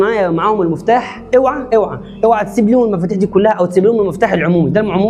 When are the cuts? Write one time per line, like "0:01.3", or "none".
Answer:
none